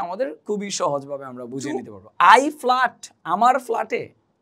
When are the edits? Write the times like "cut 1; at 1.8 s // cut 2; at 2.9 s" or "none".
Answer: cut 1; at 2.0 s